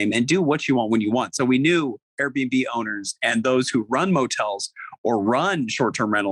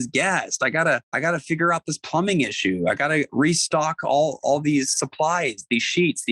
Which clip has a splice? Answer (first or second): second